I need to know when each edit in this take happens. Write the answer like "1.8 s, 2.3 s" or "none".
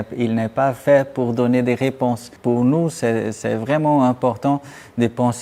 2.3 s